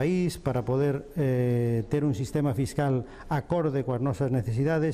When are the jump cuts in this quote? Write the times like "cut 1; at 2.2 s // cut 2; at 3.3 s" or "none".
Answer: cut 1; at 1.6 s